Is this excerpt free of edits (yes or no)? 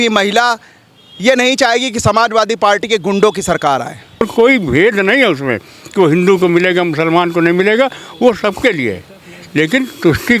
no